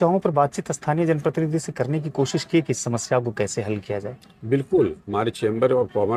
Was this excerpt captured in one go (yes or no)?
yes